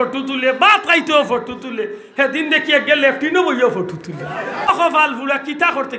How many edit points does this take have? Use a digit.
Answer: 1